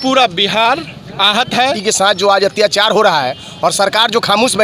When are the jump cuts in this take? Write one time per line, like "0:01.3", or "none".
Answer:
0:01.8